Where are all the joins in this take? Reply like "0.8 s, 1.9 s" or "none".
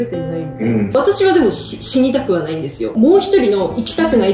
0.9 s, 2.9 s